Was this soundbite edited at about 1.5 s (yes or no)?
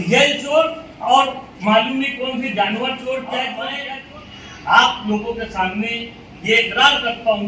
no